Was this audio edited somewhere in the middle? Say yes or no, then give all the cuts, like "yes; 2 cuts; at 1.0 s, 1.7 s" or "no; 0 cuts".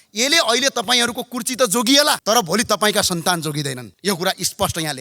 yes; 2 cuts; at 2.2 s, 3.8 s